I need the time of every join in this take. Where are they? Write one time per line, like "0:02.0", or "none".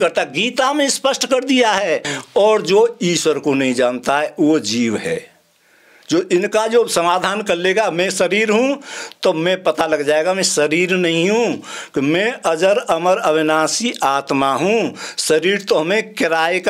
0:02.2